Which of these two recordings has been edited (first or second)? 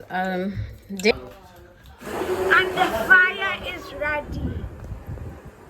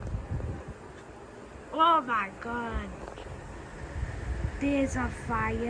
first